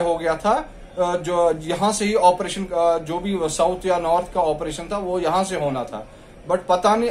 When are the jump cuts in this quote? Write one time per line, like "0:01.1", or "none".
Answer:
none